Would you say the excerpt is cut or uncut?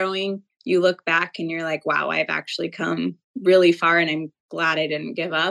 uncut